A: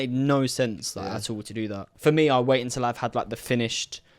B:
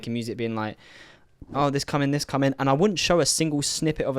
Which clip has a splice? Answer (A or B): A